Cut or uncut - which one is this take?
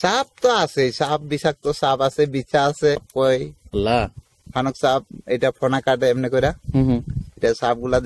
cut